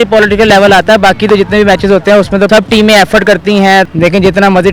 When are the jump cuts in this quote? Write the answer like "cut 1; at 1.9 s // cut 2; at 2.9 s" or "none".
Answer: cut 1; at 2.5 s // cut 2; at 3.9 s

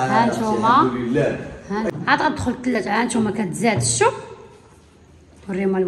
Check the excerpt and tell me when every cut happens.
cut 1; at 1.9 s

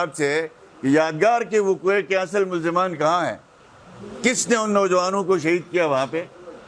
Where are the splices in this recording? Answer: none

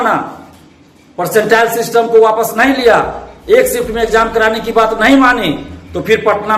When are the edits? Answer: none

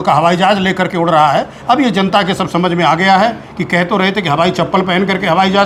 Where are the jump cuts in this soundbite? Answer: none

